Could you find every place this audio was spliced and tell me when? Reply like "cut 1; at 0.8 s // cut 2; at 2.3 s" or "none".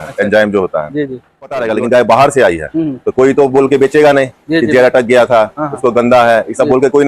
cut 1; at 1.7 s